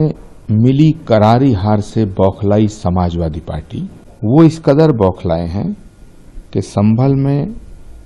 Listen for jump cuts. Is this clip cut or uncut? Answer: cut